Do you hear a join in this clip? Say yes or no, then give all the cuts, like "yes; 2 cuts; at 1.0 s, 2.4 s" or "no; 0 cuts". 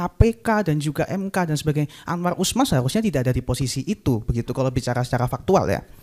no; 0 cuts